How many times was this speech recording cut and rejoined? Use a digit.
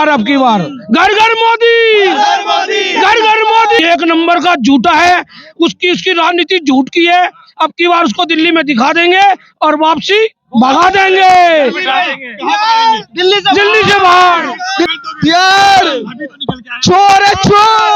2